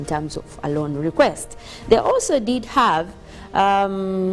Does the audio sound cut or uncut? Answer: cut